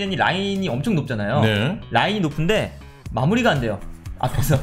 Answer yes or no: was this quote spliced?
no